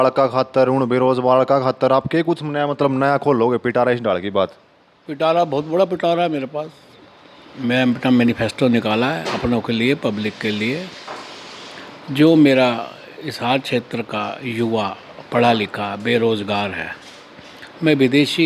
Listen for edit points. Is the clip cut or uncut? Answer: uncut